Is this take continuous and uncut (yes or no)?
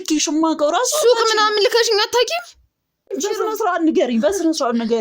no